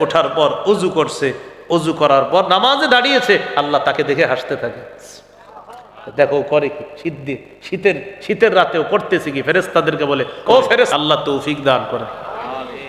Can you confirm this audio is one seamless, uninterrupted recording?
no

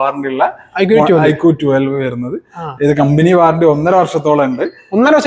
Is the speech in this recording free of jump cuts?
yes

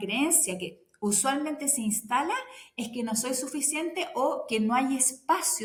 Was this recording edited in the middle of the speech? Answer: no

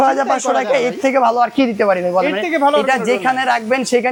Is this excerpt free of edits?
yes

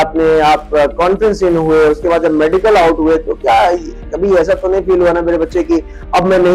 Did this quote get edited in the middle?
no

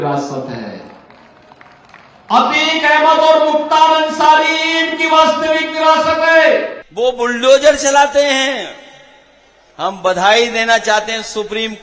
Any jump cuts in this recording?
yes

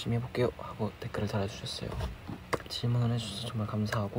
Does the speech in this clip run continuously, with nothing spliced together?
no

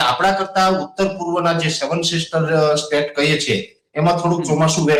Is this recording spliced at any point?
no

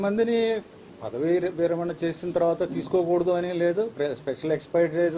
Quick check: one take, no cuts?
yes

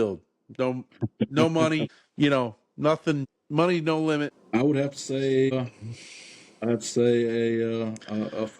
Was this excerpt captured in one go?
no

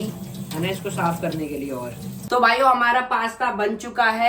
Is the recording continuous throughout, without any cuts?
no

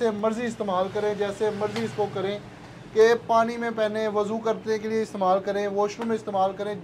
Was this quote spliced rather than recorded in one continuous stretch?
no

